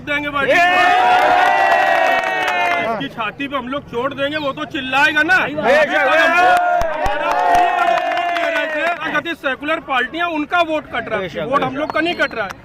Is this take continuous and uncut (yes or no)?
no